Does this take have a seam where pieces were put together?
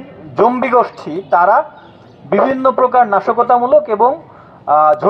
no; 0 cuts

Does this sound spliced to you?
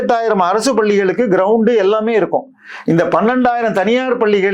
no; 0 cuts

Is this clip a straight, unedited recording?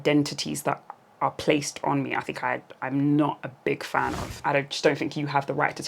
no; 1 cut; at 4.3 s

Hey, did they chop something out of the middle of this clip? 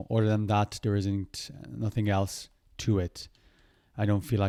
no; 0 cuts

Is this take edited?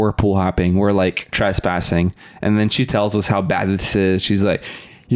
yes; 1 cut; at 1.3 s

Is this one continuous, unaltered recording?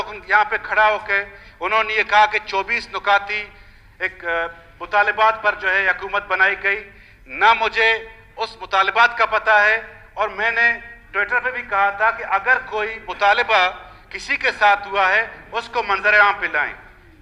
yes; 0 cuts

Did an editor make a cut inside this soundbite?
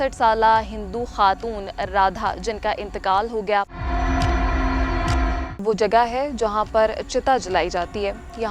yes; 2 cuts; at 3.8 s, 5.6 s

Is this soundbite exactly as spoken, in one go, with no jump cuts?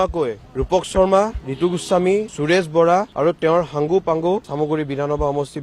yes; 0 cuts

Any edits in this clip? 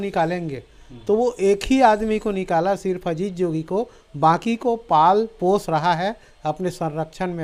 no; 0 cuts

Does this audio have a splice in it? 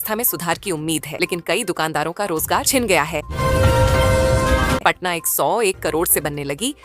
yes; 2 cuts; at 3.3 s, 4.8 s

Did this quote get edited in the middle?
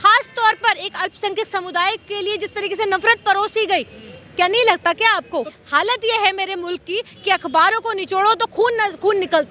yes; 1 cut; at 5.6 s

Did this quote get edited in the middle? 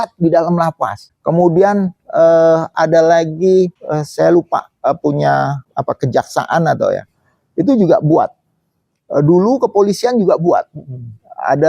yes; 3 cuts; at 1.1 s, 3.8 s, 5.7 s

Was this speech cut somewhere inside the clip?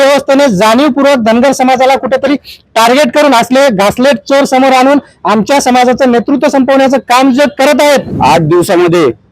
yes; 1 cut; at 8.1 s

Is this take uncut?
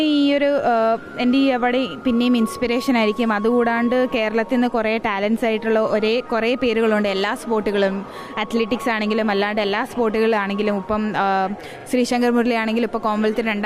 yes; 0 cuts

